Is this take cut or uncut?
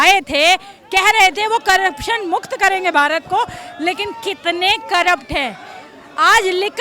uncut